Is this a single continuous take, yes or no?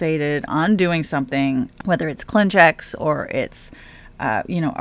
no